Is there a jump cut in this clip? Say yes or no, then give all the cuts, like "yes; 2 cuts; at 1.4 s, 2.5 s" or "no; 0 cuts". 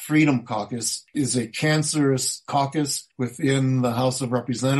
yes; 1 cut; at 1.1 s